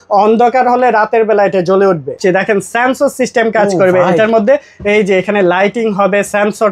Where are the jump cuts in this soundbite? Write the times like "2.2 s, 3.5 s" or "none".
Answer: 2.2 s